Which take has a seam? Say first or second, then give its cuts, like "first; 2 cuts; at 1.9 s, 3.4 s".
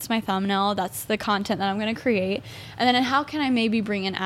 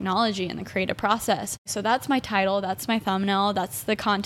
second; 1 cut; at 1.6 s